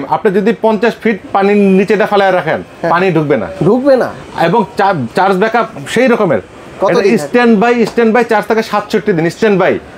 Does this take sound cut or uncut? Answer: uncut